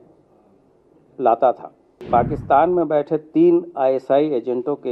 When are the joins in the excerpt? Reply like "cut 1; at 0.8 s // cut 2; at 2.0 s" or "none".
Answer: cut 1; at 2.1 s